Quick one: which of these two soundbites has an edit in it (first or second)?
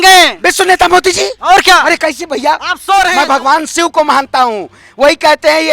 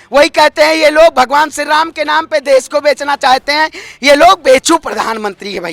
first